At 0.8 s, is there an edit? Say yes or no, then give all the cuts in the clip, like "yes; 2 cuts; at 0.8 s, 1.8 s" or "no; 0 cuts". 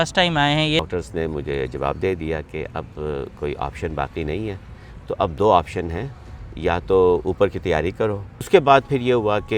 yes; 2 cuts; at 0.8 s, 8.5 s